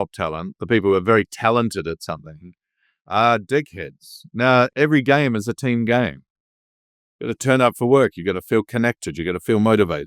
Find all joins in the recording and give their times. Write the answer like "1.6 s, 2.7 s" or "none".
4.7 s

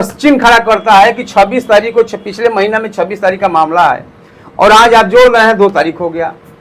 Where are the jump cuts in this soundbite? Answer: none

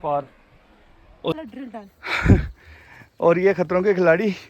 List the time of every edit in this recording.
1.3 s

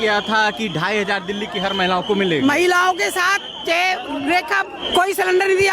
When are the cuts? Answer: 4.8 s

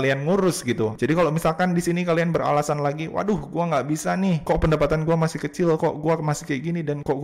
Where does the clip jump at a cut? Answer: 0.9 s

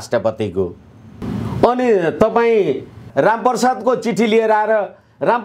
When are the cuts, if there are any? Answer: 1.1 s, 3.1 s

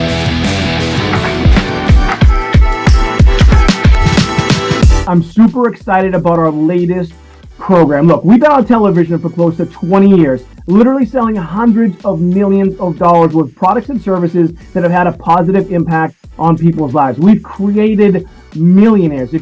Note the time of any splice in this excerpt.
1.1 s

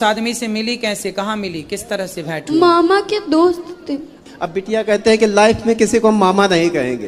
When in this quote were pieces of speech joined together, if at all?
4.2 s

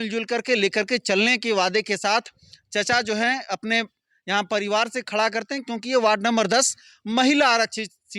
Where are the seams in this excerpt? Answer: none

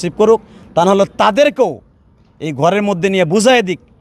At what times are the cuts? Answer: none

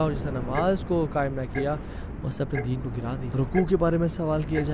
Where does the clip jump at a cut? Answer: 3.3 s

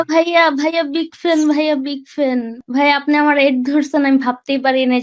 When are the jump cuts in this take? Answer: 2.6 s

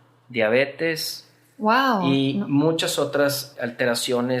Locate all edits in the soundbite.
3.5 s

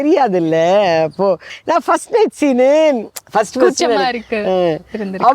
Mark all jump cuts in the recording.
1.5 s

